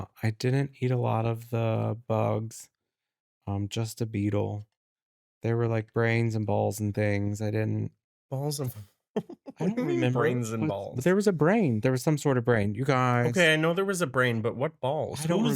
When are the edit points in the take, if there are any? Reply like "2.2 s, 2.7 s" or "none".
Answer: 8.1 s

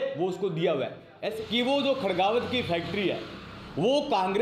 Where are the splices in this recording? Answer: 1.4 s

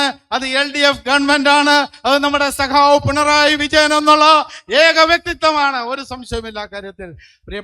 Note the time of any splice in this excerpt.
none

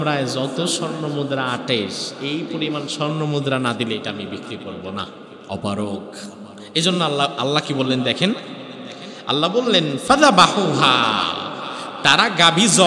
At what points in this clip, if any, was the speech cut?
5.3 s

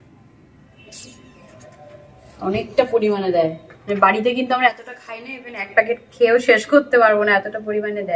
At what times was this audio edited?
none

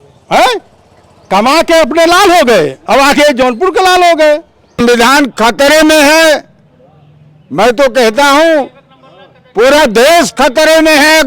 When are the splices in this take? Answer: 4.8 s

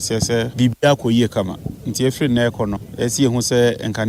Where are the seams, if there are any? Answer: none

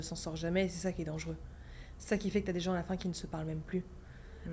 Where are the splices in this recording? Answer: none

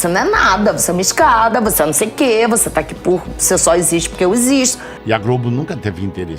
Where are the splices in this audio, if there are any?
4.8 s

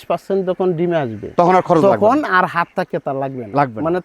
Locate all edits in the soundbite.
none

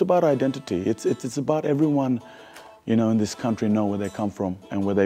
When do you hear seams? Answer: none

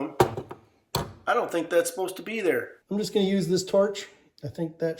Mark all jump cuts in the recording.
2.8 s

